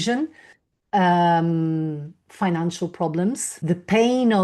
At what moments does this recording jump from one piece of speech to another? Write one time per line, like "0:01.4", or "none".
0:03.5